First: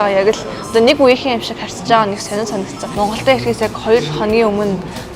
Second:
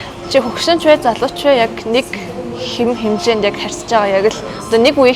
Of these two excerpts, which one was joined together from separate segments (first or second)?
first